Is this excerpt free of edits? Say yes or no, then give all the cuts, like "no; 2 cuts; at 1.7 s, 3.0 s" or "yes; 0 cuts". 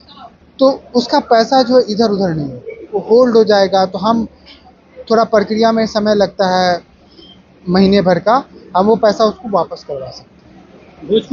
yes; 0 cuts